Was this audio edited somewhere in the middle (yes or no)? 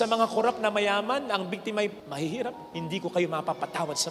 yes